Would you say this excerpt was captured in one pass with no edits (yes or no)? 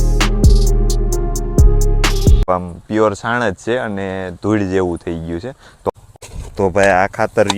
no